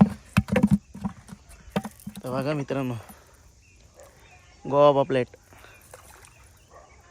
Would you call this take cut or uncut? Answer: uncut